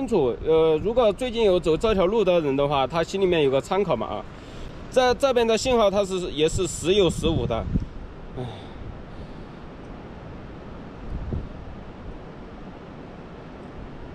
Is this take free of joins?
yes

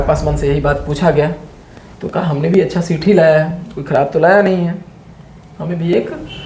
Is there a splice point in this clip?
no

